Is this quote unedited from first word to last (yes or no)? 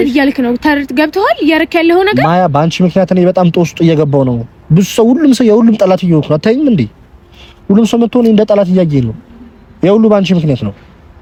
yes